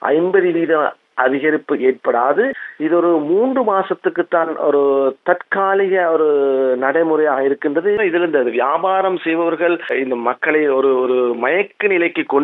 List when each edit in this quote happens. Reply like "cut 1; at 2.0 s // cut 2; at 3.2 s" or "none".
cut 1; at 2.7 s // cut 2; at 8.0 s // cut 3; at 9.9 s